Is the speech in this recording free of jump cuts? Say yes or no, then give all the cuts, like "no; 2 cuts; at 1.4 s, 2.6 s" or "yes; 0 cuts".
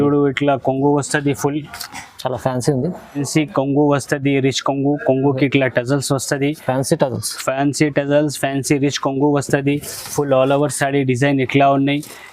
no; 1 cut; at 3.2 s